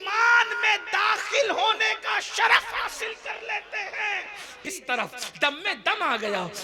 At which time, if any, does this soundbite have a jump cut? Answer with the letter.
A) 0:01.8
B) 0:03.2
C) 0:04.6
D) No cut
C